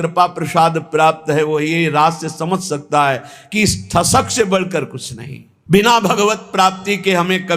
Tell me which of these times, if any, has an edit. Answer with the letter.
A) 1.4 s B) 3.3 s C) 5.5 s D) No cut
C